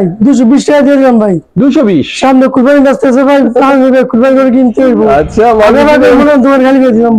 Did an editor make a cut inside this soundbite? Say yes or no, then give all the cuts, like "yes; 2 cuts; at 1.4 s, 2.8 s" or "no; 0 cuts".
no; 0 cuts